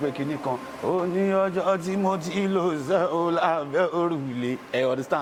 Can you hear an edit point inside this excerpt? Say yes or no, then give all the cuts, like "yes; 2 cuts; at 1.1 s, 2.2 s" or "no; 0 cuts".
no; 0 cuts